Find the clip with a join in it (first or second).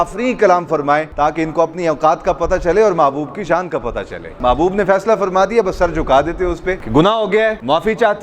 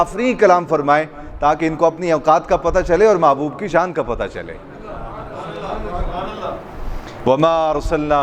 first